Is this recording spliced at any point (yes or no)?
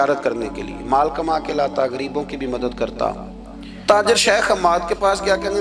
yes